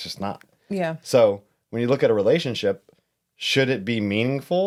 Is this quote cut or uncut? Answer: uncut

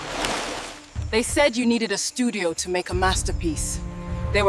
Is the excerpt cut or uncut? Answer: uncut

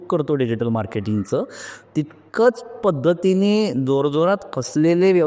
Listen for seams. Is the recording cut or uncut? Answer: uncut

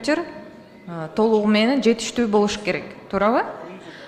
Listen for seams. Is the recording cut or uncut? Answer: uncut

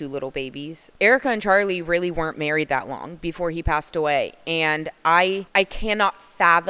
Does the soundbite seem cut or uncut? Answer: uncut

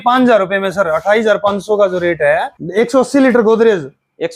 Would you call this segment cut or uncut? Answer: cut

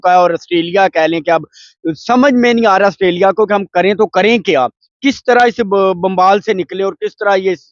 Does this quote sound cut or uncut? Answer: uncut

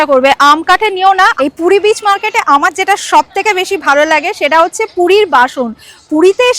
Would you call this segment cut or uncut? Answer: cut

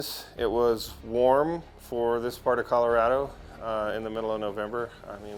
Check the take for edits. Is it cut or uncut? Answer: uncut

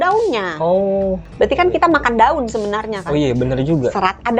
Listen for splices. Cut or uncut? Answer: cut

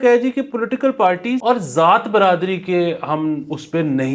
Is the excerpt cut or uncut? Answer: cut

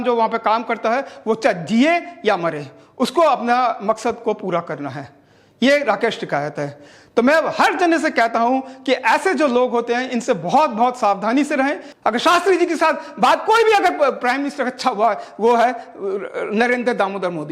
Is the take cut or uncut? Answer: cut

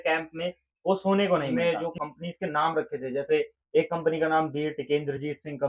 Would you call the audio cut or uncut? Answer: cut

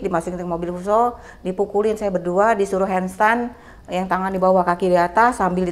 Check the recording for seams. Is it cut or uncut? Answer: uncut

